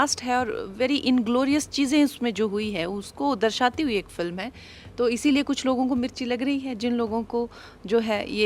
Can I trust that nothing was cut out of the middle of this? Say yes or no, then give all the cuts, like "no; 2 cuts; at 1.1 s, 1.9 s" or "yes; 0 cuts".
yes; 0 cuts